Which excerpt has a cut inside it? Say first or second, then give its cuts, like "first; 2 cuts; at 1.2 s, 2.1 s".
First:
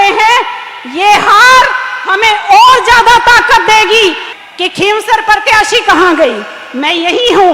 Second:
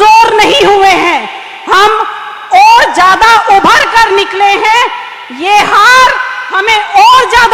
first; 1 cut; at 4.3 s